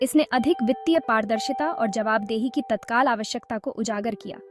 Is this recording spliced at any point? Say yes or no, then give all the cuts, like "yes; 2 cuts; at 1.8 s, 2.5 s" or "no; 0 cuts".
no; 0 cuts